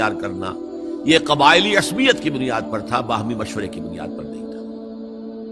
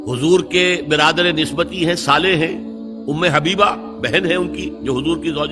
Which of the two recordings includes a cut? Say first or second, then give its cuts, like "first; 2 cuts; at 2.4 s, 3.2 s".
first; 1 cut; at 3.8 s